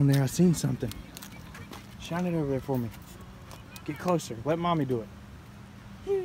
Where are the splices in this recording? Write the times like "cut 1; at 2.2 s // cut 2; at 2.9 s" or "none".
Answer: none